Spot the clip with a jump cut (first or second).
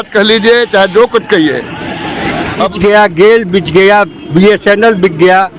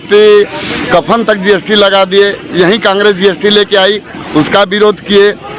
first